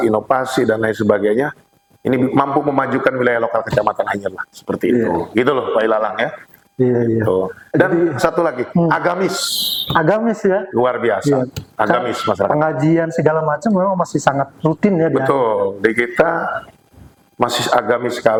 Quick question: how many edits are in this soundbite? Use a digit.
0